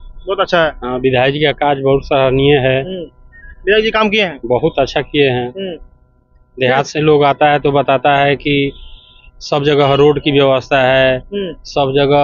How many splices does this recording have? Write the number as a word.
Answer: zero